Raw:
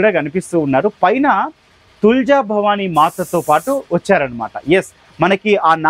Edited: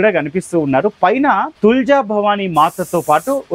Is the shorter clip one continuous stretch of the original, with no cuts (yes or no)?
no